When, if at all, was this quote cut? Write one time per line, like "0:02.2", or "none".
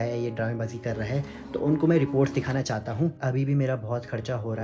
0:03.2